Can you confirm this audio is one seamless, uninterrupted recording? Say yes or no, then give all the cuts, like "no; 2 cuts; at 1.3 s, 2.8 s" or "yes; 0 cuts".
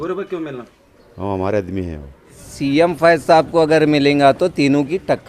no; 1 cut; at 2.4 s